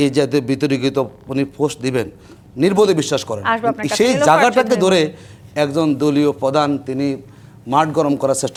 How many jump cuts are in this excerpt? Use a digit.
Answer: 0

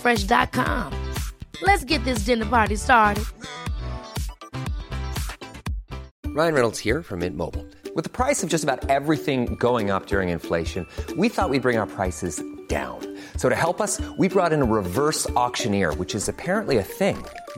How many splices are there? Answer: 1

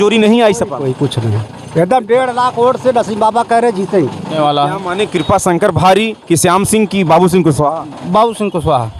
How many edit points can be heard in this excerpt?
1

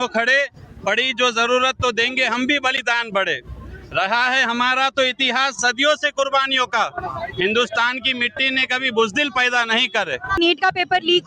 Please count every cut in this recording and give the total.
1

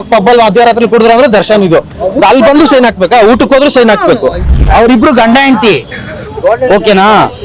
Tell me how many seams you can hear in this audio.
2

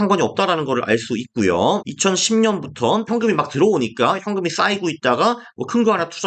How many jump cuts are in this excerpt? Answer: 2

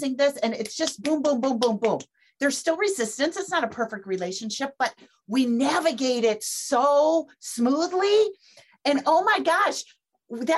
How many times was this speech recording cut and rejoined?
1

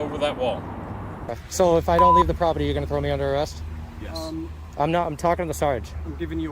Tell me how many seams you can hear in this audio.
1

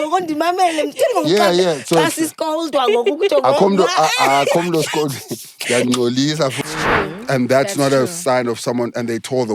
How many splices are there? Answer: 1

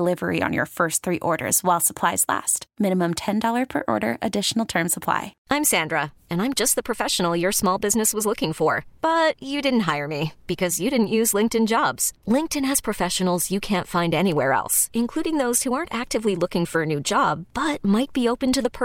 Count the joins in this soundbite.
1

